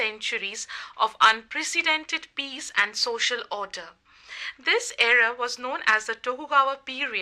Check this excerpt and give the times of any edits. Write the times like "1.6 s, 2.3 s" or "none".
none